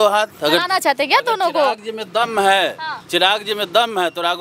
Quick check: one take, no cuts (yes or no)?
yes